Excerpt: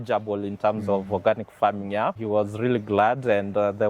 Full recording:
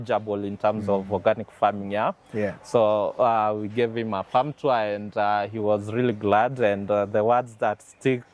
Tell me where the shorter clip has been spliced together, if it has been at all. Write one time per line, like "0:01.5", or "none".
0:02.2